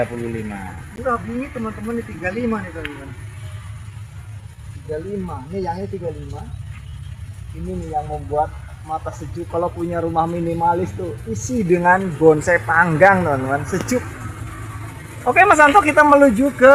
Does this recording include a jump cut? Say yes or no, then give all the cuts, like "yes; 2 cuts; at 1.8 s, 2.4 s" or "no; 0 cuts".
no; 0 cuts